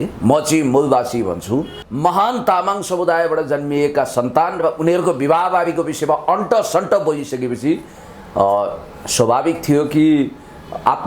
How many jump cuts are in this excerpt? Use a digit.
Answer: 1